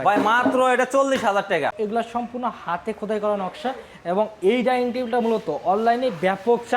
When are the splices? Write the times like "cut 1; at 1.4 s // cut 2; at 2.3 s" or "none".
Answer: cut 1; at 1.3 s